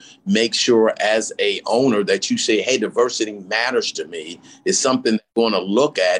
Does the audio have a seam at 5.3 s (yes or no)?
yes